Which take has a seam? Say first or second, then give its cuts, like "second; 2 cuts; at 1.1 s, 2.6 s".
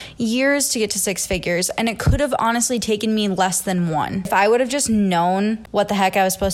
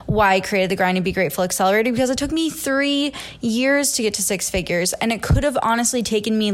first; 2 cuts; at 4.3 s, 5.6 s